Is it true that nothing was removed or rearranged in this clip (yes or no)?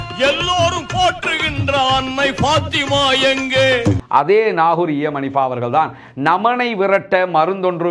yes